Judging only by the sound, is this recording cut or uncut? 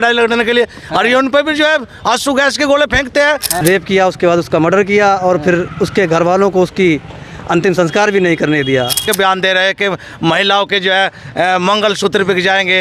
cut